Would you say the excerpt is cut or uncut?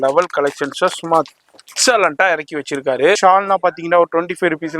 cut